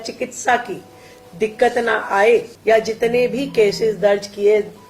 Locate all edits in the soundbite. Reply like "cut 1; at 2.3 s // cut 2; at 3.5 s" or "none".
cut 1; at 2.5 s

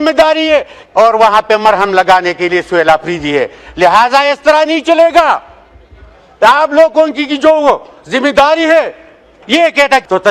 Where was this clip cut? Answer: none

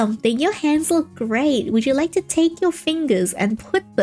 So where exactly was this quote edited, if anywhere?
none

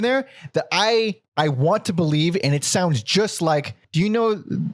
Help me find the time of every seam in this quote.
cut 1; at 1.2 s // cut 2; at 3.8 s

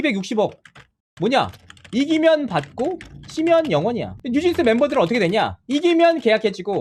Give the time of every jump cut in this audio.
none

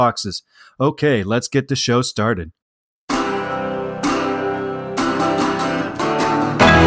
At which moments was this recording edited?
cut 1; at 2.9 s

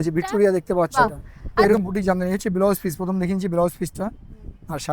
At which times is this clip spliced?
cut 1; at 1.7 s

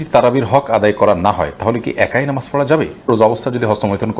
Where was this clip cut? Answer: cut 1; at 3.1 s

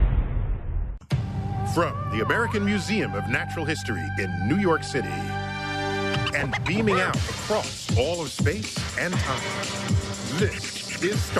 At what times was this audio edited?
none

